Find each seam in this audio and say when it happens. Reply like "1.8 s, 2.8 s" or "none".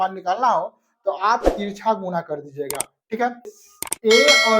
3.6 s